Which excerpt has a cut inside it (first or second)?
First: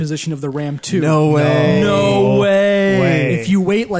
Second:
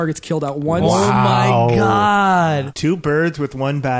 second